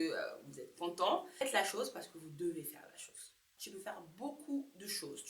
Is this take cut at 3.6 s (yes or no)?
yes